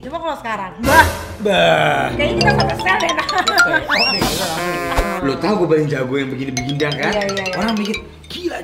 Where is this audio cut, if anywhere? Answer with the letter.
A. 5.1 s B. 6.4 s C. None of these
A